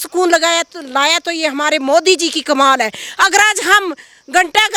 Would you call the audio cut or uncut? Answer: uncut